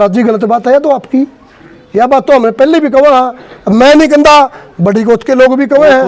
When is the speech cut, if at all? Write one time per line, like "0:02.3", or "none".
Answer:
none